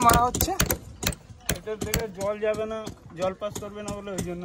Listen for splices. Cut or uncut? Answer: uncut